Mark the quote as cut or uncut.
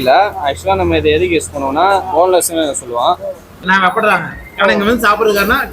cut